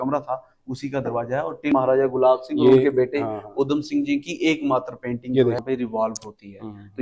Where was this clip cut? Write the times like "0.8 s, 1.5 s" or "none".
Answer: 1.7 s, 5.6 s